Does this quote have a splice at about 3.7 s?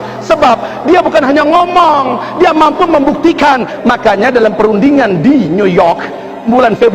yes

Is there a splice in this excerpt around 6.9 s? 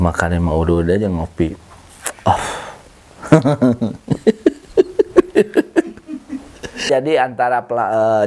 yes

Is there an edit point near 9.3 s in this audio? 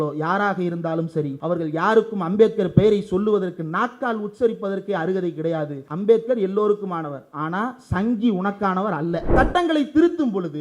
yes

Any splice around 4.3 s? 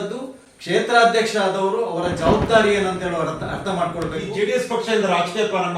yes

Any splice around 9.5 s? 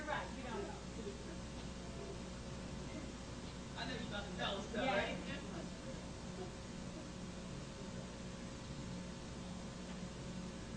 no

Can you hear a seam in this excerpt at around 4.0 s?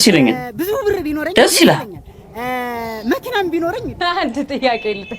yes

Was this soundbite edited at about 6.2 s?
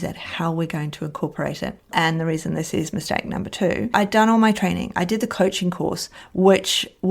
no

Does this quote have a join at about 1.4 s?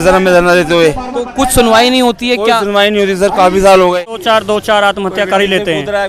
no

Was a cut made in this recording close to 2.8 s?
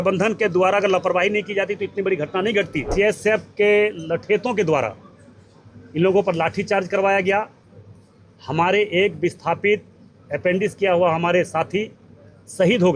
yes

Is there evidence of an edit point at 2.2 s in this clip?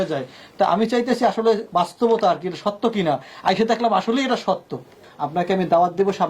no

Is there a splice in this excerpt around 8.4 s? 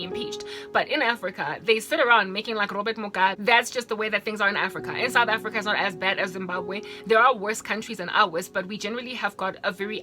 no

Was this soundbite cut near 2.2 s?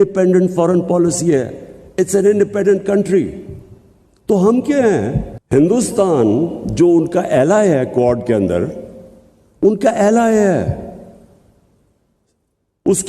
no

